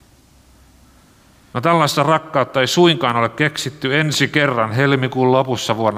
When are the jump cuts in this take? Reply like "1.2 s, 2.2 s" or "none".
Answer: 1.5 s